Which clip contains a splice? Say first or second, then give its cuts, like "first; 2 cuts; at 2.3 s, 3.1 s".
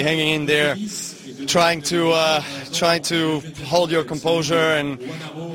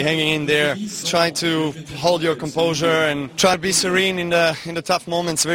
second; 2 cuts; at 0.9 s, 3.3 s